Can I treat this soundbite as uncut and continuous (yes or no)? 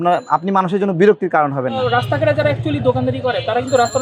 no